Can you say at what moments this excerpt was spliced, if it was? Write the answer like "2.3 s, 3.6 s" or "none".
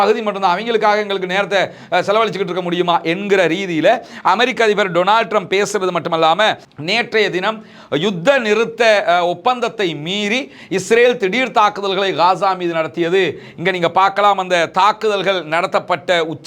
6.7 s